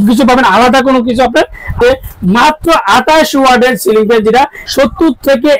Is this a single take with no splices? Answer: no; 2 cuts; at 1.8 s, 4.6 s

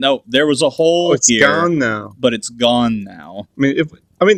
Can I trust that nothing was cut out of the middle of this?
yes; 0 cuts

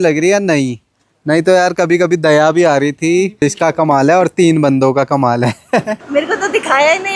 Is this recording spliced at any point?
yes; 2 cuts; at 3.4 s, 6.0 s

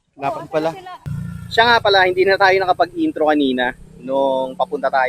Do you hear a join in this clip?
yes; 1 cut; at 1.0 s

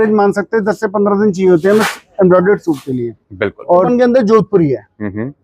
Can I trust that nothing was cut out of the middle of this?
no; 1 cut; at 3.9 s

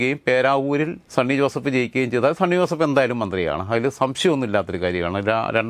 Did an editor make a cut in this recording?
yes; 1 cut; at 1.0 s

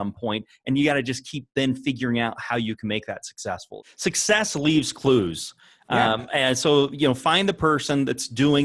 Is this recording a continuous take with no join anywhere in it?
no; 1 cut; at 3.7 s

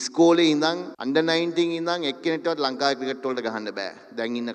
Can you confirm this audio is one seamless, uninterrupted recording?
no; 1 cut; at 0.9 s

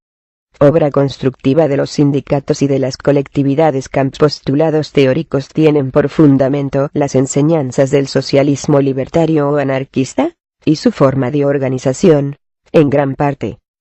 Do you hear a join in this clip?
no; 0 cuts

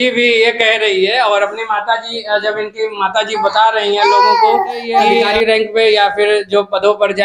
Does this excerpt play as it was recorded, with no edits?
no; 1 cut; at 5.3 s

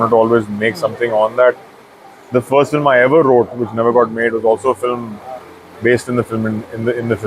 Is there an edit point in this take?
no; 0 cuts

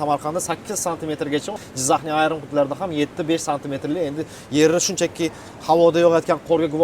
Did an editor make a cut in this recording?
yes; 1 cut; at 1.5 s

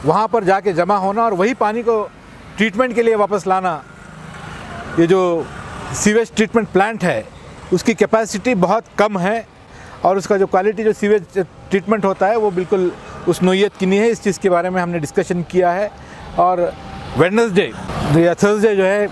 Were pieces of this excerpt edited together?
no; 0 cuts

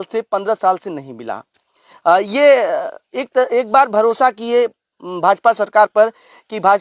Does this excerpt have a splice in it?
no; 0 cuts

